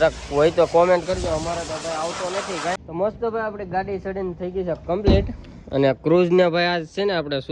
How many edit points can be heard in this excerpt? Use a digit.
1